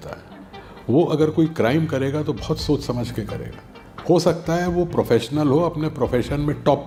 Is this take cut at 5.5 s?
no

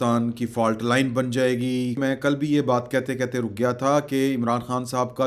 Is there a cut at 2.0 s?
yes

